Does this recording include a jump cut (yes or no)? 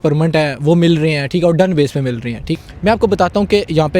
yes